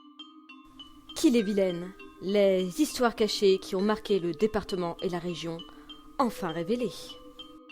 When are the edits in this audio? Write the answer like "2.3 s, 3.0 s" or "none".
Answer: 1.2 s